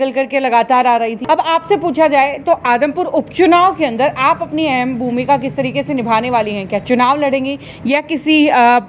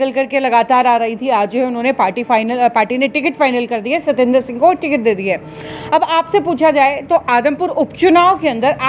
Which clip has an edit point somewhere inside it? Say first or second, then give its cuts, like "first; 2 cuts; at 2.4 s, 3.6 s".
first; 1 cut; at 1.2 s